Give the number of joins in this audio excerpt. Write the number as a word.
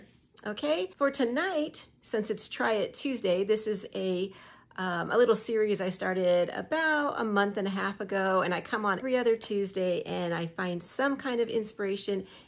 two